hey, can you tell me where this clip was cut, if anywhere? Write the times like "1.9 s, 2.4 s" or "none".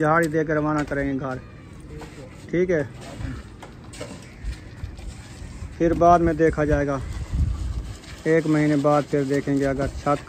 none